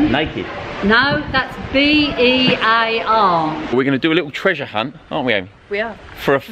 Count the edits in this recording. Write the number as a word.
one